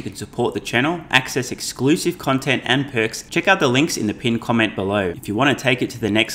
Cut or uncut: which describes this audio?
cut